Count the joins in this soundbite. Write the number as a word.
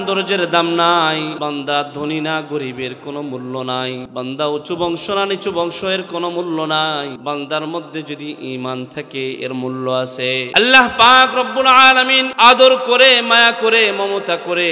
five